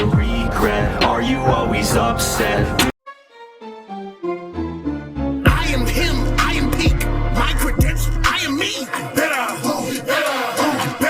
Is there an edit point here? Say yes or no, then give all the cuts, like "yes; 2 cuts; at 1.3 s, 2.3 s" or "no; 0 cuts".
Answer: yes; 1 cut; at 2.9 s